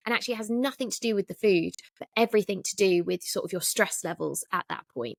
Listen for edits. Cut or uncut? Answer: uncut